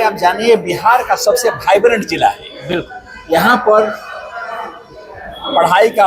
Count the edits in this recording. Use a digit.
0